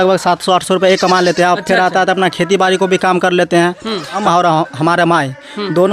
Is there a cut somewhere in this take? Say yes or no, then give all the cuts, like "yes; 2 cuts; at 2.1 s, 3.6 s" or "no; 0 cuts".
yes; 1 cut; at 4.2 s